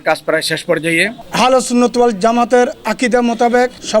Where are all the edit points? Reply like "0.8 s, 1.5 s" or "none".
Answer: 1.2 s